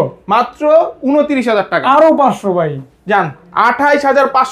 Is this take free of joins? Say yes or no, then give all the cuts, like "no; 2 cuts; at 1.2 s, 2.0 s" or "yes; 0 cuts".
yes; 0 cuts